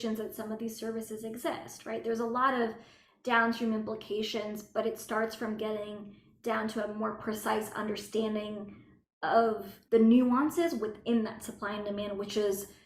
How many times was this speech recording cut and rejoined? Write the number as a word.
one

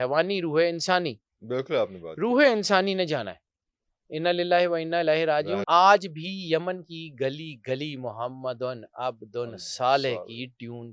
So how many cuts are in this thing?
one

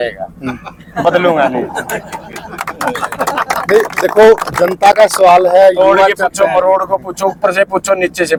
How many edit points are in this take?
zero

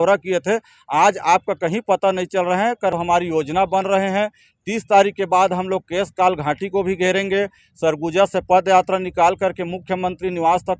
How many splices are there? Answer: one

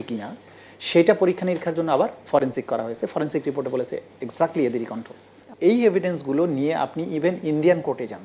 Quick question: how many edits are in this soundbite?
one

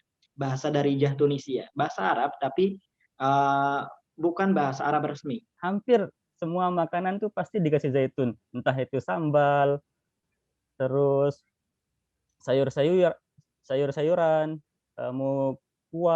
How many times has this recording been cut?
one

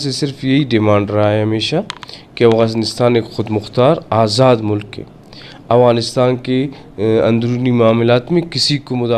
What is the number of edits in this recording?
zero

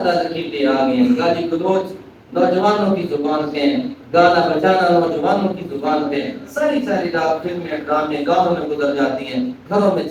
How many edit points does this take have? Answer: zero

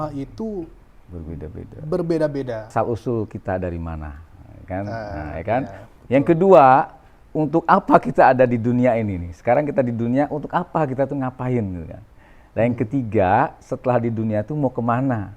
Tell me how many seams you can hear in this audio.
one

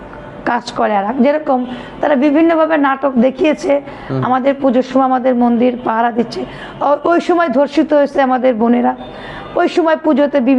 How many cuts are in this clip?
zero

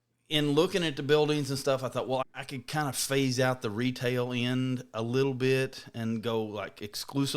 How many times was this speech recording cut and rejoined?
one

